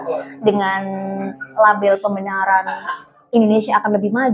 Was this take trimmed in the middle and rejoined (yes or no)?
no